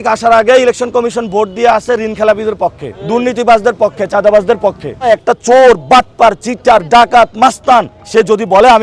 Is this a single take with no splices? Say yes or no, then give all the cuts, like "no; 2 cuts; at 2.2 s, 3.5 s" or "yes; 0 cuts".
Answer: no; 3 cuts; at 2.9 s, 5.1 s, 8.0 s